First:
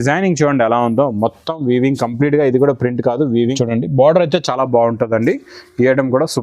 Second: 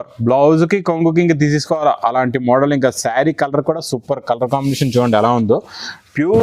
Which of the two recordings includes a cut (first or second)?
first